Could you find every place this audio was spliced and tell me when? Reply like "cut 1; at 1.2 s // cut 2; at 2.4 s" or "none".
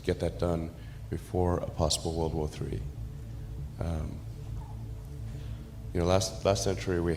cut 1; at 4.4 s // cut 2; at 5.9 s